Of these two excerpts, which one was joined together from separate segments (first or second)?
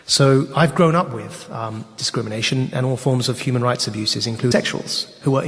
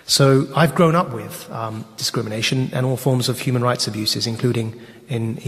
second